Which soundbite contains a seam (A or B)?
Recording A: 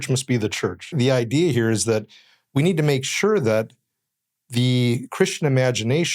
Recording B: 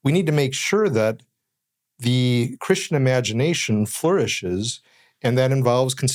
A